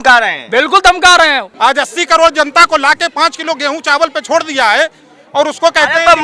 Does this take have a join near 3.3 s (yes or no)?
no